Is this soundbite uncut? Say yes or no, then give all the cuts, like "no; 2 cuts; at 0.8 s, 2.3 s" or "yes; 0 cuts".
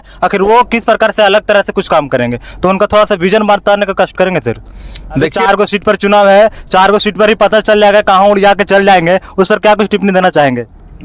no; 1 cut; at 5.4 s